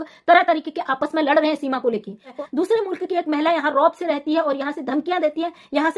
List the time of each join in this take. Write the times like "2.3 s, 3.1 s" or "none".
2.3 s